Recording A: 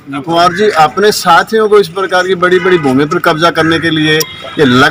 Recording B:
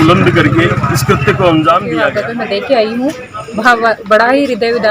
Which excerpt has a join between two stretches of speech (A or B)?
B